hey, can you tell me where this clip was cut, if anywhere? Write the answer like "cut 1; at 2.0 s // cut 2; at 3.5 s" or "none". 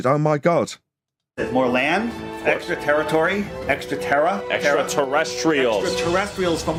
none